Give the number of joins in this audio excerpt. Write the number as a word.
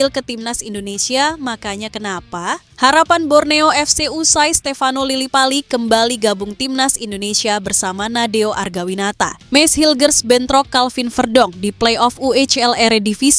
two